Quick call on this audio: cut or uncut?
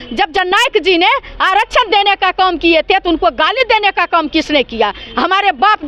uncut